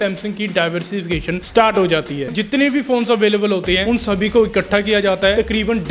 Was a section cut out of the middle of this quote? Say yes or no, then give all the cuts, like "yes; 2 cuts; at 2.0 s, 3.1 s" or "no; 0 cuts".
yes; 1 cut; at 2.2 s